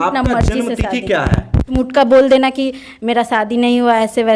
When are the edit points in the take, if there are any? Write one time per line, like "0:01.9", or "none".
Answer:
0:01.7